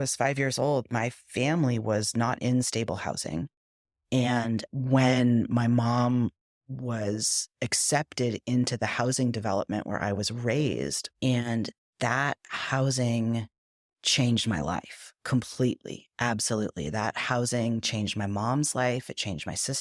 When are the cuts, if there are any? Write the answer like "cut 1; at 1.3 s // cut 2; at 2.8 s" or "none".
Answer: cut 1; at 11.0 s

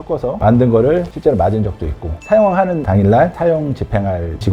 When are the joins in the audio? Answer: cut 1; at 2.1 s

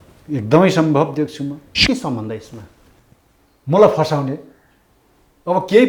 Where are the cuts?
cut 1; at 1.7 s

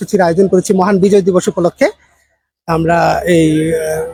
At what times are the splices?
none

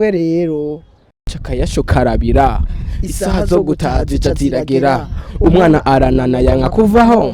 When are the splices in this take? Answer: cut 1; at 1.4 s

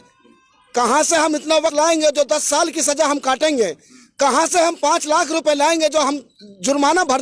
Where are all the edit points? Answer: cut 1; at 1.7 s

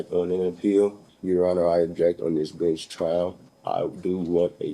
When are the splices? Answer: cut 1; at 1.1 s // cut 2; at 3.5 s

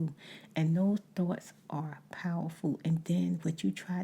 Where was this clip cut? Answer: none

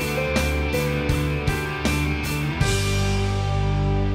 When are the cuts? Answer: none

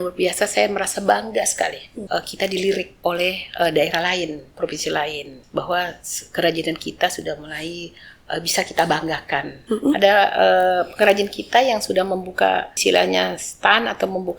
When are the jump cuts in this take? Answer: cut 1; at 1.9 s // cut 2; at 2.9 s // cut 3; at 5.3 s // cut 4; at 9.5 s // cut 5; at 12.7 s

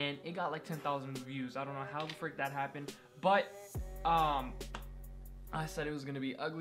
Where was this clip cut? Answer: cut 1; at 2.4 s

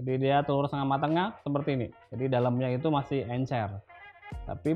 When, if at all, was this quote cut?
none

